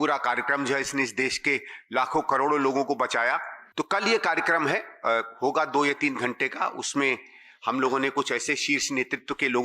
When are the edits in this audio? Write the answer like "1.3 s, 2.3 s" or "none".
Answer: 3.6 s